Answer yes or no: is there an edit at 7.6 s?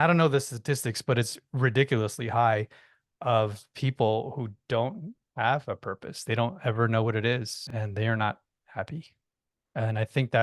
yes